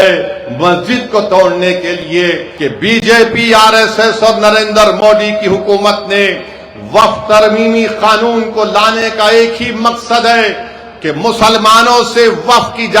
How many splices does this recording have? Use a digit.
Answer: 1